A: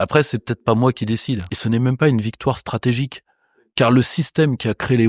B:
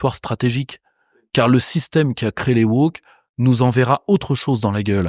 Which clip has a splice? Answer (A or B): A